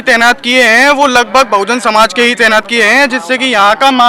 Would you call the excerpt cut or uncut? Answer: uncut